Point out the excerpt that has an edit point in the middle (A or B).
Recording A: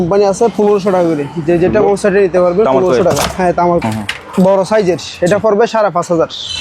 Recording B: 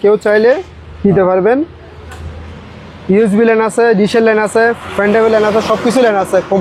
A